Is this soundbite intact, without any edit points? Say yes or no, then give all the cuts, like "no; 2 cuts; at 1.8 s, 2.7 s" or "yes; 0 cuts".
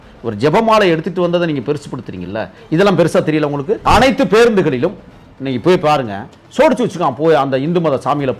no; 1 cut; at 3.8 s